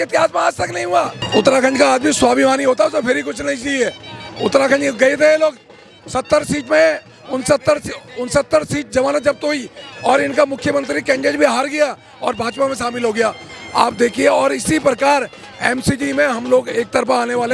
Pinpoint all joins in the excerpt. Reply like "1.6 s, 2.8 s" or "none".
1.2 s